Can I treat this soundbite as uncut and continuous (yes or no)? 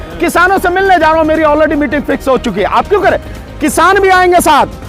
yes